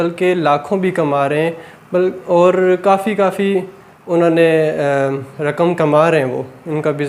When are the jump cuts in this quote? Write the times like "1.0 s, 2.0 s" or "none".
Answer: none